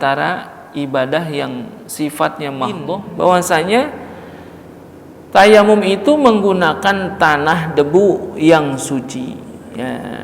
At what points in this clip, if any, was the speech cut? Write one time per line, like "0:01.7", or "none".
0:02.9